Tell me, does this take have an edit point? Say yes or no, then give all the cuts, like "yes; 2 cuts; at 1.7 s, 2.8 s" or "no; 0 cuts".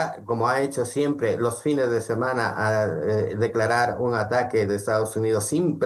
no; 0 cuts